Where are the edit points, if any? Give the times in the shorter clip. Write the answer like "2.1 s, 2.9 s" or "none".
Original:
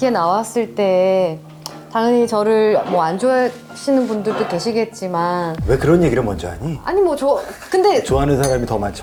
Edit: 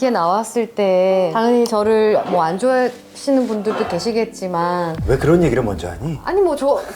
1.3 s

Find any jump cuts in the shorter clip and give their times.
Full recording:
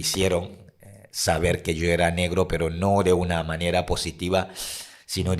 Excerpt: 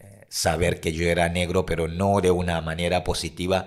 none

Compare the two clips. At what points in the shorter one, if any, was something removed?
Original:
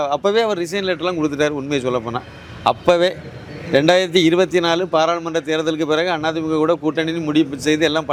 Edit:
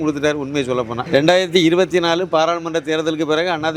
1.0 s

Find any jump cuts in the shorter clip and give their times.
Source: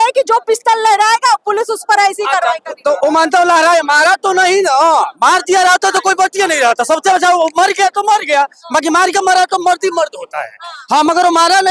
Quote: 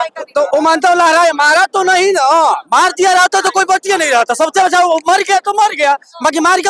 none

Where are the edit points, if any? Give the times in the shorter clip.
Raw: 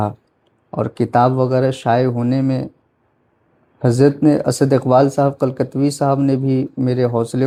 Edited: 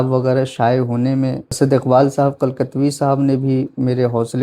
1.5 s

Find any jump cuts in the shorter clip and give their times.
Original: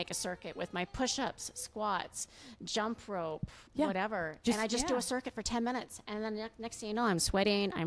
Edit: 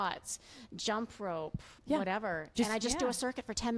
none

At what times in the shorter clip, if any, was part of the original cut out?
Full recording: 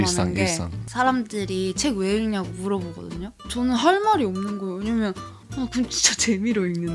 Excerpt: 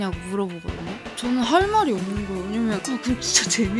2.8 s

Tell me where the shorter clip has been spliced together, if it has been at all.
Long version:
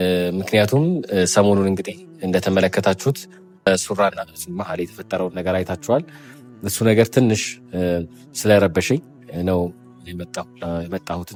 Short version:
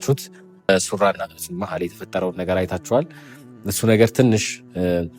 none

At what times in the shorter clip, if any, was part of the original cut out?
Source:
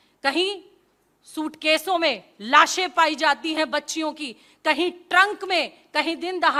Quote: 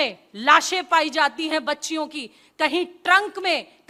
none

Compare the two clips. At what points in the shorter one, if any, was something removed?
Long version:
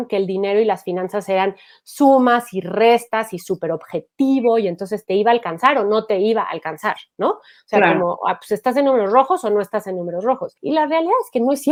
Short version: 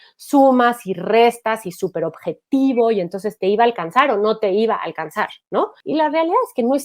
5.8 s

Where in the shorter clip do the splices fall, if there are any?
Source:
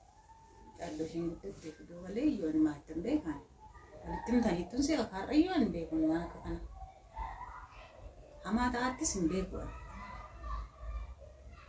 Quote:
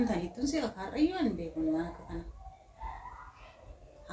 none

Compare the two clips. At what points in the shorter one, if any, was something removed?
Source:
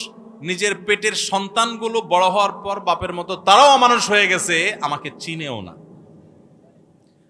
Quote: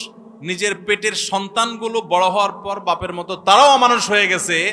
none

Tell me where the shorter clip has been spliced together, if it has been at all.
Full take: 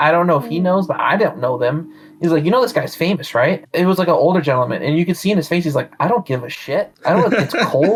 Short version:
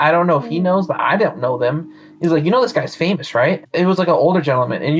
none

